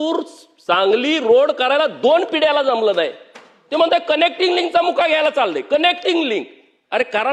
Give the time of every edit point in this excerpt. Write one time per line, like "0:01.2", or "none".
none